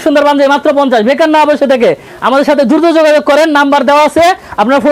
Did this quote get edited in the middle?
no; 0 cuts

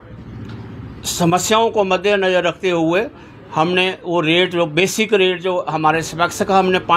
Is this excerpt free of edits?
yes; 0 cuts

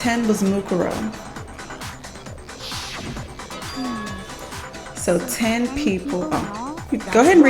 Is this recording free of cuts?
yes; 0 cuts

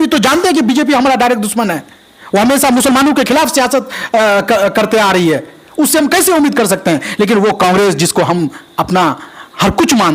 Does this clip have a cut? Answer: no; 0 cuts

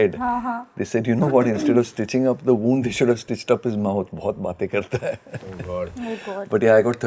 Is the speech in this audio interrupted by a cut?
no; 0 cuts

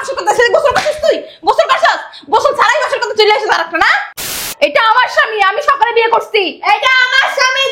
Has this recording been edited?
yes; 1 cut; at 4.4 s

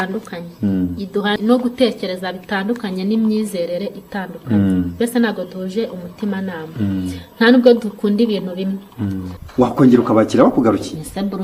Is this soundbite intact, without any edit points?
no; 2 cuts; at 1.4 s, 9.3 s

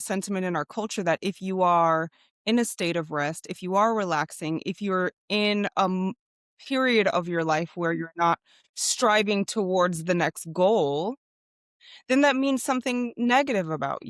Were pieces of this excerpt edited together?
no; 0 cuts

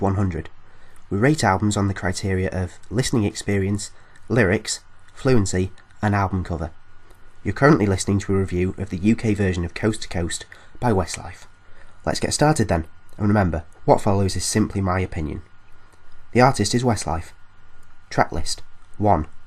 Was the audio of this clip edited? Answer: no; 0 cuts

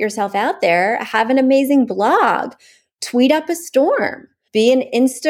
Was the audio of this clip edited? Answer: no; 0 cuts

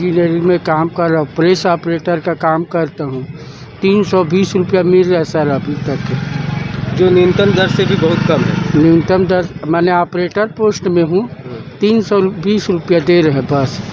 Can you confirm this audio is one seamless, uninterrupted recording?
yes; 0 cuts

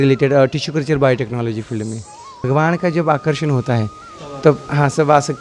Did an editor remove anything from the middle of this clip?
yes; 1 cut; at 2.5 s

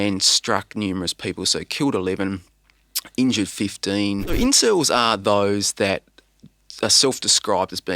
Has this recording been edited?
yes; 1 cut; at 4.3 s

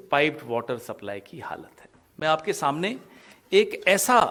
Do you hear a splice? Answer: no; 0 cuts

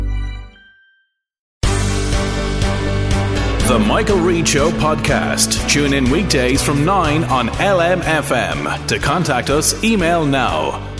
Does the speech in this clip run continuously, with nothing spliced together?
no; 1 cut; at 1.4 s

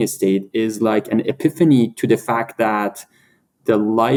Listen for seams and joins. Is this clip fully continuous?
yes; 0 cuts

